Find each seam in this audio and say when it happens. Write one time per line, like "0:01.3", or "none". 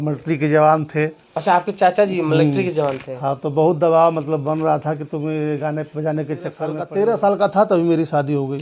0:06.8